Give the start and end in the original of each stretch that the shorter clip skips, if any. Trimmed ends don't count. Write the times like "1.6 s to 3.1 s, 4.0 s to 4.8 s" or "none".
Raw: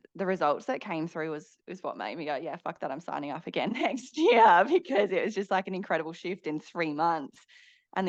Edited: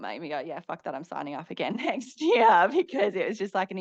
none